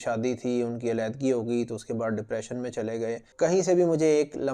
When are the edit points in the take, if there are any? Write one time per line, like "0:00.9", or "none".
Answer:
0:03.3